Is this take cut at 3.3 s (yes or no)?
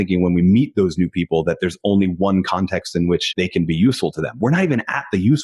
yes